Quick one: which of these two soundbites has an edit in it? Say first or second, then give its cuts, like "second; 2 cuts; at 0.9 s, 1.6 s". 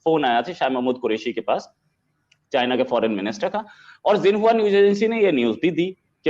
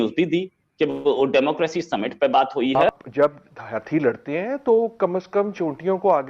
second; 1 cut; at 2.6 s